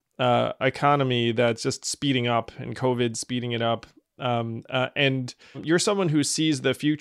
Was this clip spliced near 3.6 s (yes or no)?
no